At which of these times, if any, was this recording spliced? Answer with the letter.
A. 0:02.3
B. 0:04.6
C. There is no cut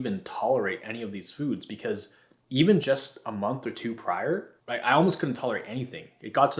B